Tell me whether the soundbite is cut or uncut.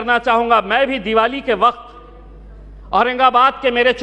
uncut